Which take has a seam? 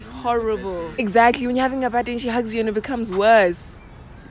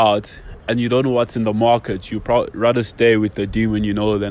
first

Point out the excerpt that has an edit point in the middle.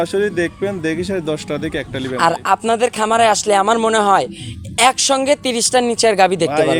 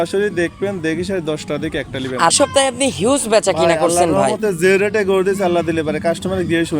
second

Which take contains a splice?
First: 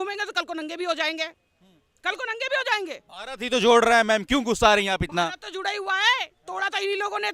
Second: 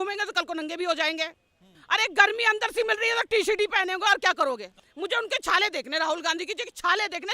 second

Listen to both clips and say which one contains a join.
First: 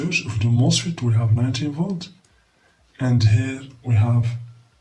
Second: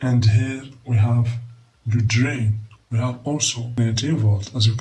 second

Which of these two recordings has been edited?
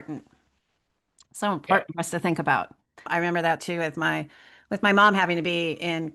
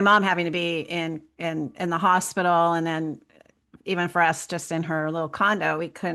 first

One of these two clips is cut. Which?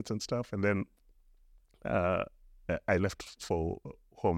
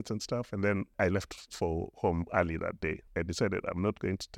second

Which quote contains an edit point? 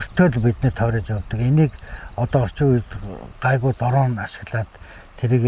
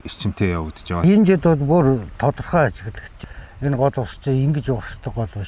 second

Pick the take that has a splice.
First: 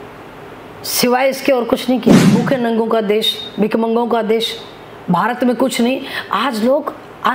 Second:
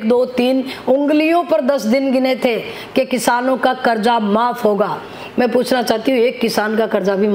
first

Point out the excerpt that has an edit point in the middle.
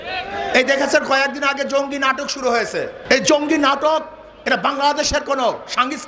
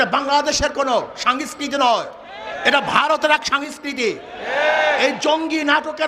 first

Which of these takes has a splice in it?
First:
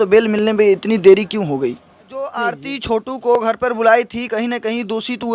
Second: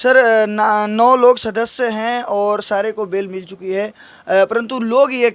first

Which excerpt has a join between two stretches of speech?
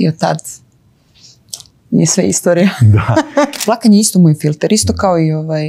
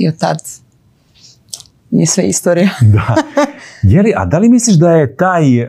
first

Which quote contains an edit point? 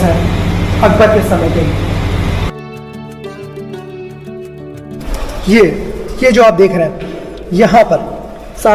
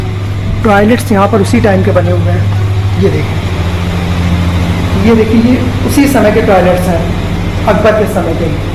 first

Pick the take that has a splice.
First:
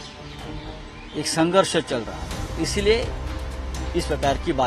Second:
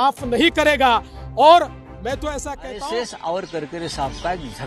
second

